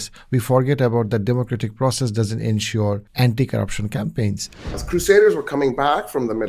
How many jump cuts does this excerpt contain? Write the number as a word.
two